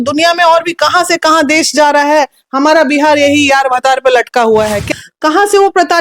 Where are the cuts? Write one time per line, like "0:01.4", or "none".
0:04.9